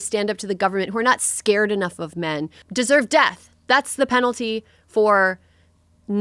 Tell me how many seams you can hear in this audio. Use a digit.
1